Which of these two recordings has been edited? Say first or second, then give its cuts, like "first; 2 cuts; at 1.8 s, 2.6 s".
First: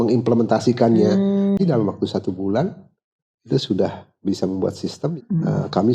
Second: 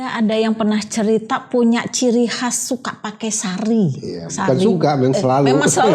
first; 2 cuts; at 1.6 s, 5.0 s